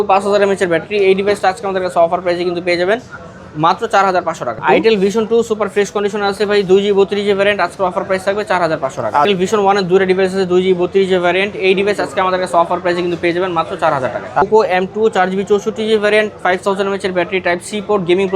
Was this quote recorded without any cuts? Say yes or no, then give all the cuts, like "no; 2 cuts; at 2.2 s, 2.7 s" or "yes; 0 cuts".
no; 3 cuts; at 4.6 s, 9.3 s, 14.4 s